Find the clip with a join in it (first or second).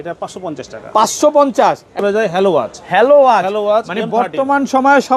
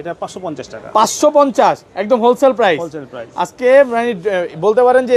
first